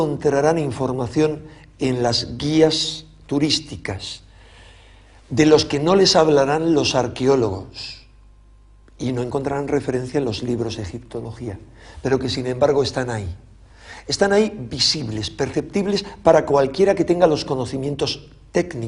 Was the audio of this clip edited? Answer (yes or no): no